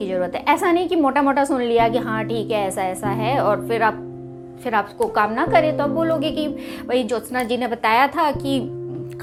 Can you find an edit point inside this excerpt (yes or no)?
no